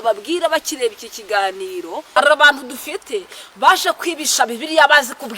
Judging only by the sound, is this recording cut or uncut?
cut